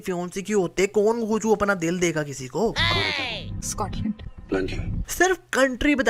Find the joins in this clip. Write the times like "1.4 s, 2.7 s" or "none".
none